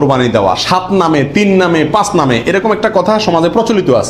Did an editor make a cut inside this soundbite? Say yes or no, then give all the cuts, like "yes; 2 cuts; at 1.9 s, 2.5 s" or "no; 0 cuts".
no; 0 cuts